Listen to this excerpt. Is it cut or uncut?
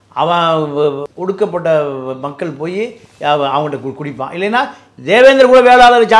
cut